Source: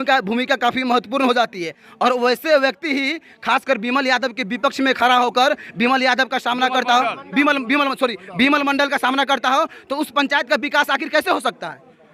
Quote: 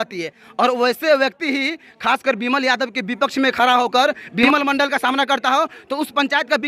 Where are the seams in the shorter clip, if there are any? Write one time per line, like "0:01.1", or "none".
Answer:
0:04.5